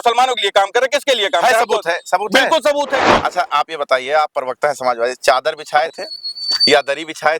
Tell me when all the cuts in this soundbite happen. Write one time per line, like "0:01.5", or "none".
0:03.1